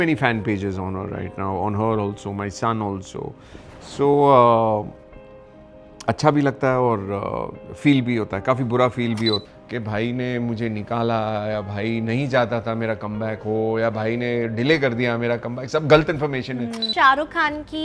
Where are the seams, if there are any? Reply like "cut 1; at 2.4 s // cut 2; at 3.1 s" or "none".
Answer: cut 1; at 9.5 s // cut 2; at 16.9 s